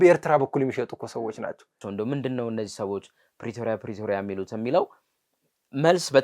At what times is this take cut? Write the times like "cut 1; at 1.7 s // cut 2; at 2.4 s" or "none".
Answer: cut 1; at 1.8 s